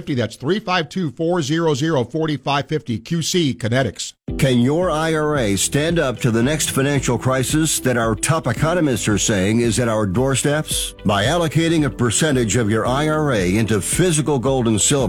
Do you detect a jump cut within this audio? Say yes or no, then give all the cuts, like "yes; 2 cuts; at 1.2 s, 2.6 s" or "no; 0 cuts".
yes; 1 cut; at 4.1 s